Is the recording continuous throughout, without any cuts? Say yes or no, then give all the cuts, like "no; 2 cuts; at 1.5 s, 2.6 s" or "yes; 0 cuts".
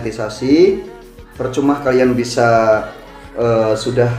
yes; 0 cuts